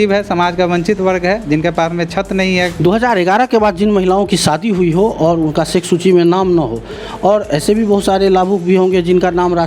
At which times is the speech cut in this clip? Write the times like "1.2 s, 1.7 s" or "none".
2.8 s